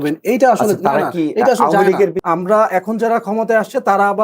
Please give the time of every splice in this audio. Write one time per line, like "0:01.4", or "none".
0:02.2

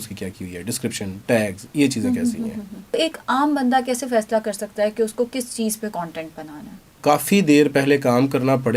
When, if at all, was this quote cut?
0:02.9
0:07.0

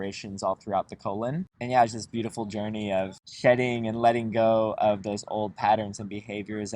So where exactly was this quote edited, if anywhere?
0:01.5

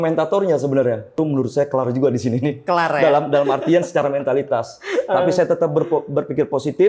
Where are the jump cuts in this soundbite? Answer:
0:01.2

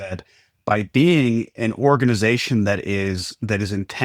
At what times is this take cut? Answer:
none

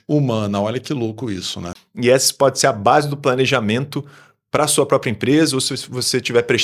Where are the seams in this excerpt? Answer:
0:01.8

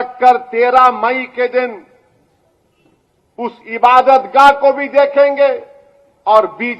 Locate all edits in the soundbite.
none

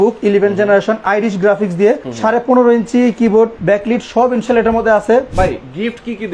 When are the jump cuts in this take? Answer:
0:02.1
0:03.6
0:05.3

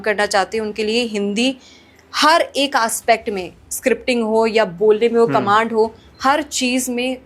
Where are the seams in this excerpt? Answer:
none

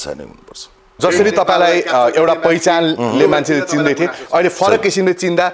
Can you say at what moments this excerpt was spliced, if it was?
0:01.0

